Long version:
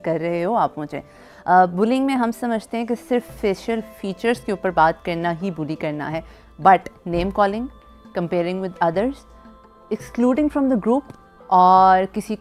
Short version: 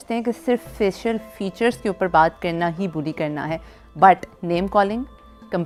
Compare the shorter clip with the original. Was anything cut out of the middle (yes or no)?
no